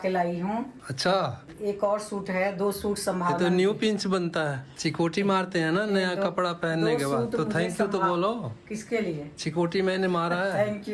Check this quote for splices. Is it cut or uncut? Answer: cut